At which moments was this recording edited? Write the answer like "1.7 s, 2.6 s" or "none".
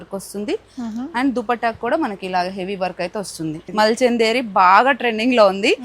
3.6 s